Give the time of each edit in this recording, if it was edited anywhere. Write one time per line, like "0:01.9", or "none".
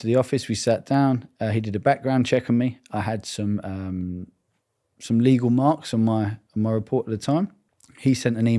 0:07.7